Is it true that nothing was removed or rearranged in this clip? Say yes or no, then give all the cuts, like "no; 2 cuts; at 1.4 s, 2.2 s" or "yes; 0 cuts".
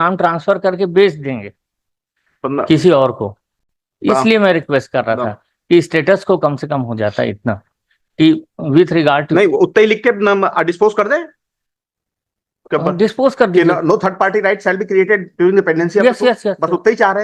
yes; 0 cuts